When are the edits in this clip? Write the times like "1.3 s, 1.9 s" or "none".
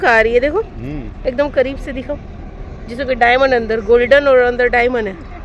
none